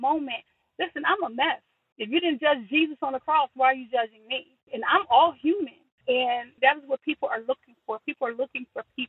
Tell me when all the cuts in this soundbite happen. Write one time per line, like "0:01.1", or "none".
0:05.8